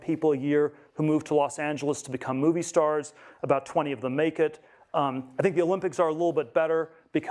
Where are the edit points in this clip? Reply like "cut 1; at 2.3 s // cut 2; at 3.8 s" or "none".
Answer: none